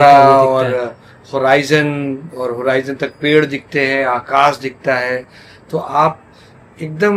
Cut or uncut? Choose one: uncut